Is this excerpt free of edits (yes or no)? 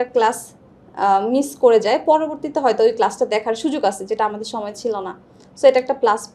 yes